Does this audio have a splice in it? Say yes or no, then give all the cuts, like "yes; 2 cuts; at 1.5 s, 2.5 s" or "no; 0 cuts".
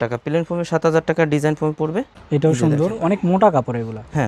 no; 0 cuts